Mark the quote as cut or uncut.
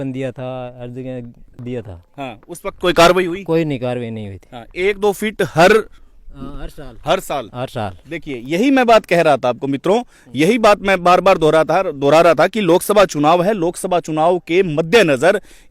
cut